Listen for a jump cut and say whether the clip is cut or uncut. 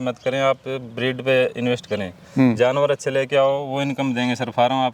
uncut